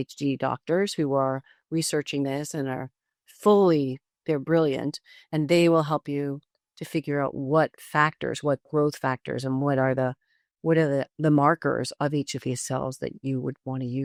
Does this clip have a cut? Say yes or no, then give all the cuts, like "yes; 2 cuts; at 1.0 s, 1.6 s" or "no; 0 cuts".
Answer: no; 0 cuts